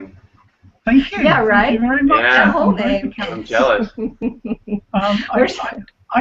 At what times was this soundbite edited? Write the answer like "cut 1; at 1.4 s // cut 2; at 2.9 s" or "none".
cut 1; at 1.1 s